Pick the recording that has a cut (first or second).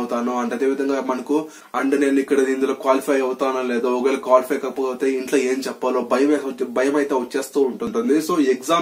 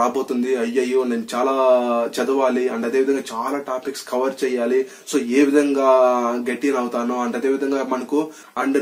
first